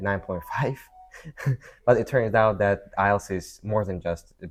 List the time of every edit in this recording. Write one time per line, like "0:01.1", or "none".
none